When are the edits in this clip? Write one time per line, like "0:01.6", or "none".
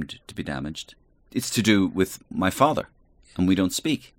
0:01.2
0:02.3